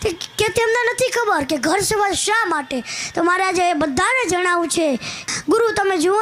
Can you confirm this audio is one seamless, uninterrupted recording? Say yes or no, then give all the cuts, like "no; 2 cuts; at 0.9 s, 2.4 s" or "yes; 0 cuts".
no; 1 cut; at 5.1 s